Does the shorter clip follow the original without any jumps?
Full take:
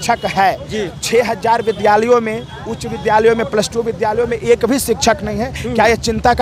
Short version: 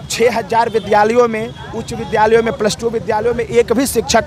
yes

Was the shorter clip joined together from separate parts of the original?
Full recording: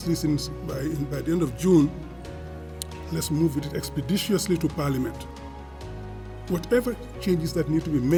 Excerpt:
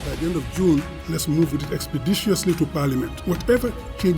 yes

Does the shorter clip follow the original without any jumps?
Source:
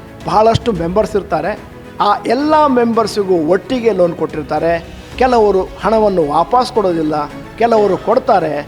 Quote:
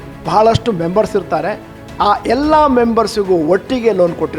yes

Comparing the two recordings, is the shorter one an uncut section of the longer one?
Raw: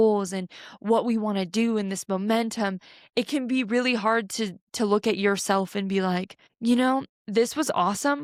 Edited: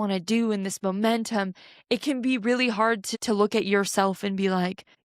no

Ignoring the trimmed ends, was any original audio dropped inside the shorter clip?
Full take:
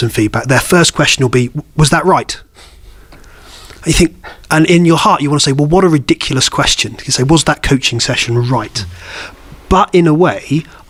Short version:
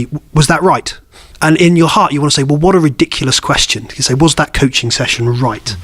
yes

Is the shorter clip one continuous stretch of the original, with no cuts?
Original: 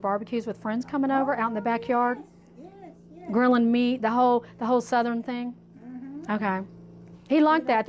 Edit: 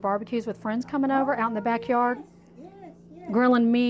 yes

